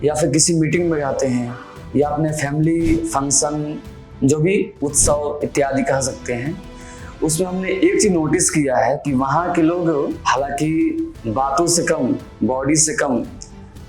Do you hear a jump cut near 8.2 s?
no; 1 cut; at 10.2 s

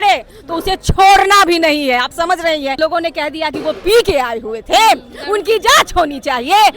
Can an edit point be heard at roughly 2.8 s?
yes; 1 cut; at 2.8 s

